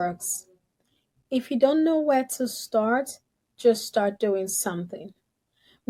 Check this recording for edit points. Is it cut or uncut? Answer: uncut